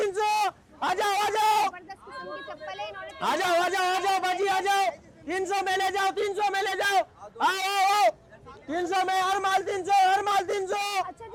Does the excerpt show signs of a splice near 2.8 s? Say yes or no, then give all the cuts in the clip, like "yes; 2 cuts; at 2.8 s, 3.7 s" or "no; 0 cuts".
no; 0 cuts